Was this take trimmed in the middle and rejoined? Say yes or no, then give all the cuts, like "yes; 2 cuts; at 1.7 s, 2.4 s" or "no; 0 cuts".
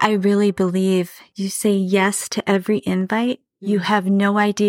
yes; 1 cut; at 1.2 s